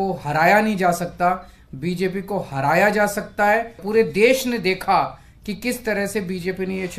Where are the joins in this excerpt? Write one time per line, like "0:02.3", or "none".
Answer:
0:03.8